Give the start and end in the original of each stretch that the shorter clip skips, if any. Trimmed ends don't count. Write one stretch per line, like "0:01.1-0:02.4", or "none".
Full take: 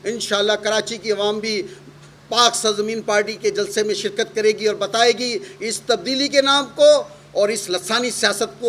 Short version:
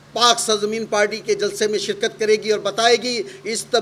none